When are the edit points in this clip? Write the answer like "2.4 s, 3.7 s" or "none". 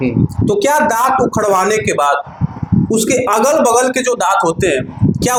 none